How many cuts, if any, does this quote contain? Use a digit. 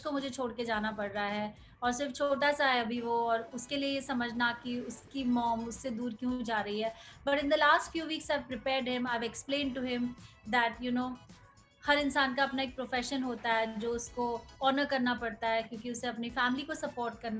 0